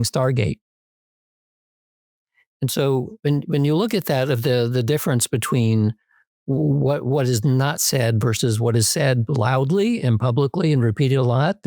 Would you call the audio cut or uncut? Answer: uncut